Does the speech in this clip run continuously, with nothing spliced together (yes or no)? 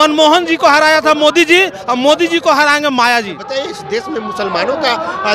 no